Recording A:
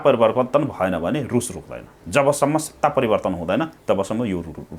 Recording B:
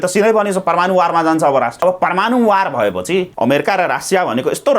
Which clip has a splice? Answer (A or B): B